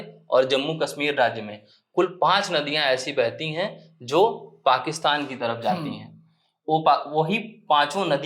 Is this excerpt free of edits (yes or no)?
yes